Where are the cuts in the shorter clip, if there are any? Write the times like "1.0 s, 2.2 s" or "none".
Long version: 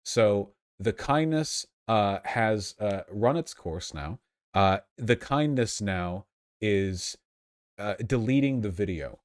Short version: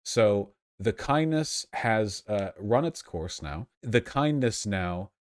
1.7 s, 3.8 s